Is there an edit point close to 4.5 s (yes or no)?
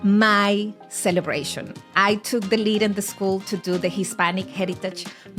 no